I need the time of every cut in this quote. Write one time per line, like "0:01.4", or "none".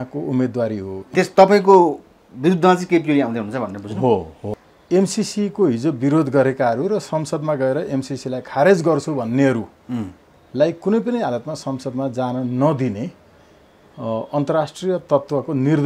0:01.0
0:04.7

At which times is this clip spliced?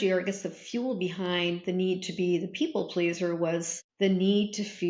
0:03.8

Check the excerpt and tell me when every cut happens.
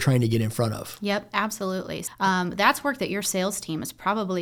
0:02.0

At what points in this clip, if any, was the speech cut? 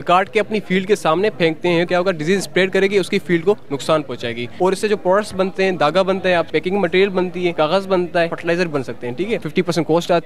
0:01.9
0:04.4
0:06.5
0:07.5
0:08.4
0:09.5

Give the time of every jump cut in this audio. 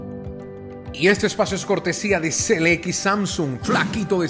none

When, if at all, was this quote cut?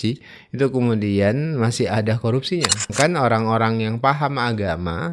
0:02.9

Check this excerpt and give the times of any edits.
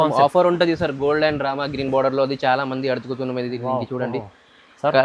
none

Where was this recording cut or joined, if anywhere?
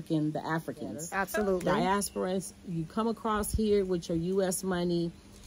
0:01.1

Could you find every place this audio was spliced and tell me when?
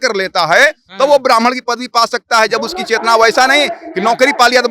none

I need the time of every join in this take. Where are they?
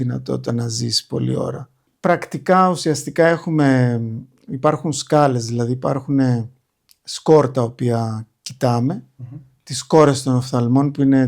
0:01.9

